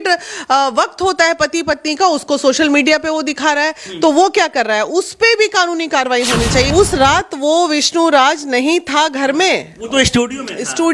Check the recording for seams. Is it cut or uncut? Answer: cut